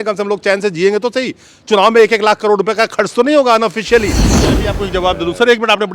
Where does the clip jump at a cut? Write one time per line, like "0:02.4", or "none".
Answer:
0:04.5